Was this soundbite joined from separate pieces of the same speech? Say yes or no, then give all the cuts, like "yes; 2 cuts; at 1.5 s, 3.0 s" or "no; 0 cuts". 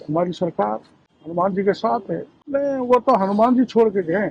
yes; 2 cuts; at 1.3 s, 2.3 s